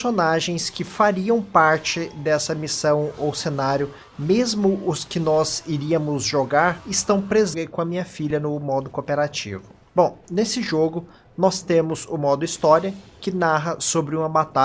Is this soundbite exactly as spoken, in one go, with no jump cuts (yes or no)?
yes